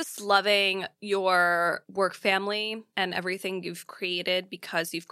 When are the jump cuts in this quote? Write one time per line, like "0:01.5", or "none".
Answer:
0:00.9
0:01.8
0:02.8